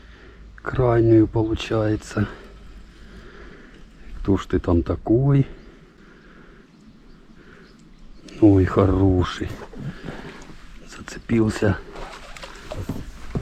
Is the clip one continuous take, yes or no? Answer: no